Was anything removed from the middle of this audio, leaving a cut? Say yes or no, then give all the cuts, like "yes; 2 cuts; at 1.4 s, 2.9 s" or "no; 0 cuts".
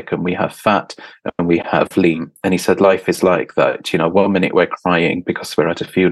yes; 1 cut; at 2.3 s